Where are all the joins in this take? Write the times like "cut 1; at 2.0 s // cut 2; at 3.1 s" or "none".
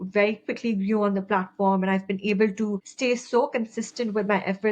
cut 1; at 2.9 s